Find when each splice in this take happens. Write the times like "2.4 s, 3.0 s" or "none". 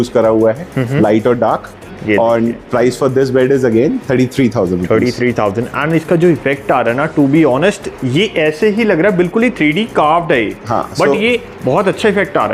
none